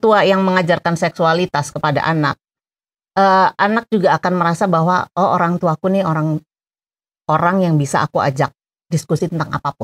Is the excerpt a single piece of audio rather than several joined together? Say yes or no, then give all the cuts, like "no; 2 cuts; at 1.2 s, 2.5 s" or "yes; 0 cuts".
yes; 0 cuts